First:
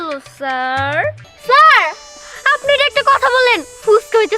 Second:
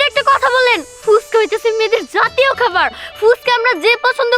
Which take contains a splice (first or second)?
first